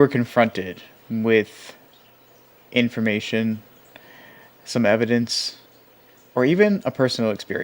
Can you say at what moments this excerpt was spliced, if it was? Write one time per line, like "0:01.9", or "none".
0:01.8